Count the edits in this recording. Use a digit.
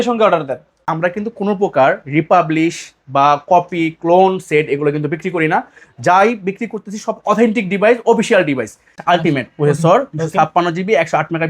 2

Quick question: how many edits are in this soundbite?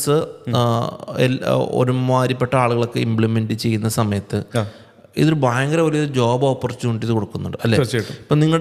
0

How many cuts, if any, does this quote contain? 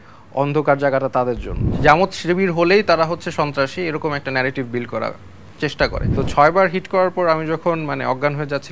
2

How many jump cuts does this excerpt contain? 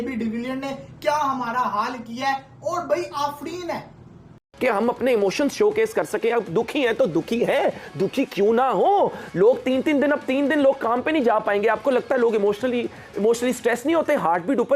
1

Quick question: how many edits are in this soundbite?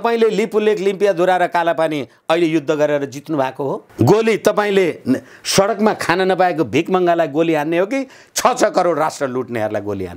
1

